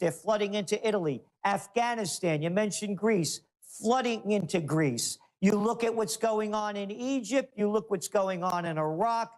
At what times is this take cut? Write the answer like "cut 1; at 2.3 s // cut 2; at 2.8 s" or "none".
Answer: cut 1; at 3.9 s